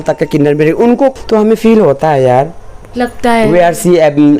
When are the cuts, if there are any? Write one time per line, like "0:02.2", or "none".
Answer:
0:01.1